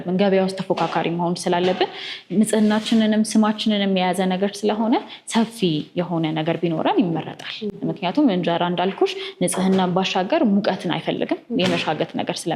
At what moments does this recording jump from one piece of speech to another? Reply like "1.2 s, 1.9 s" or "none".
none